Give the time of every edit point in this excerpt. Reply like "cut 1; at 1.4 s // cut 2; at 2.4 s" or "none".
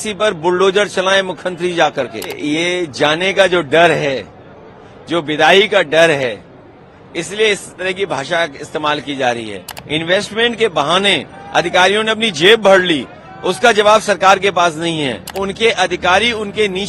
cut 1; at 2.3 s // cut 2; at 9.7 s // cut 3; at 15.4 s

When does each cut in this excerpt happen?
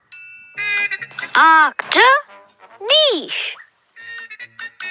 cut 1; at 0.9 s

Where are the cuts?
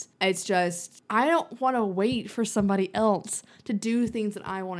cut 1; at 0.9 s

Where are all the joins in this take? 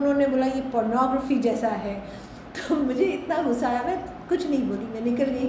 none

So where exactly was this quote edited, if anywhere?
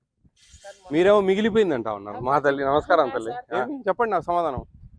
cut 1; at 3.6 s

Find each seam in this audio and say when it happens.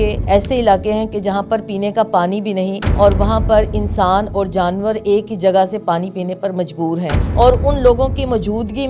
cut 1; at 7.2 s

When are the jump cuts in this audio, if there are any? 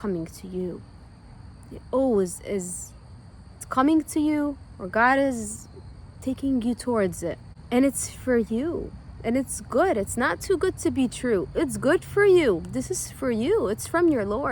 cut 1; at 7.5 s

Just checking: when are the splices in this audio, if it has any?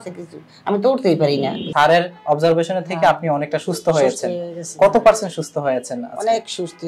cut 1; at 1.7 s

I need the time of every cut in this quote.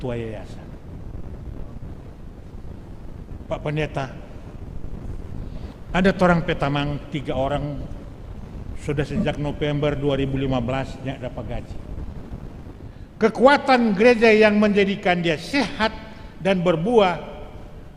cut 1; at 13.0 s

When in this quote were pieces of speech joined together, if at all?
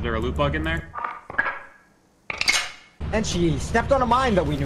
cut 1; at 2.9 s

